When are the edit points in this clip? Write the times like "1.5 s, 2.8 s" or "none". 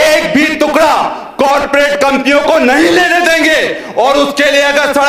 none